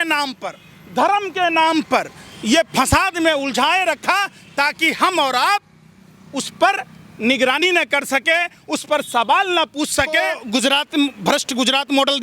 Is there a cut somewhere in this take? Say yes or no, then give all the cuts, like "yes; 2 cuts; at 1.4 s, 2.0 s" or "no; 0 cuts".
yes; 1 cut; at 10.4 s